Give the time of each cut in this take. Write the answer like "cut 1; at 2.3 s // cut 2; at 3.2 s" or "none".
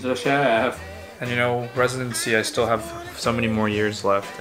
cut 1; at 1.2 s